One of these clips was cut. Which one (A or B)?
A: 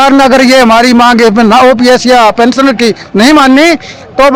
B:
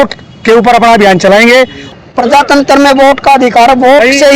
B